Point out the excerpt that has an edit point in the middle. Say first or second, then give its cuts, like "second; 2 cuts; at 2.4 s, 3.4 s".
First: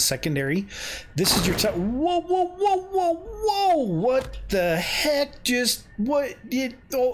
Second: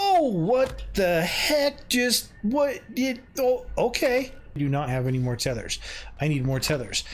second; 1 cut; at 4.6 s